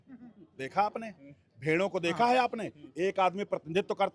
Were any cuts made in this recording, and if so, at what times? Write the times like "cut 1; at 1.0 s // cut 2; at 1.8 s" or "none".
none